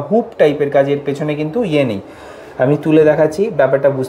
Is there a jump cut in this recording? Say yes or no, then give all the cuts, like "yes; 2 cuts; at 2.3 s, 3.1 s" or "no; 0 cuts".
no; 0 cuts